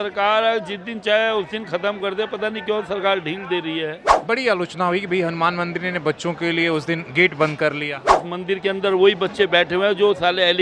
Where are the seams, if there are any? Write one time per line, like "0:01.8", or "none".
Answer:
0:04.1
0:08.1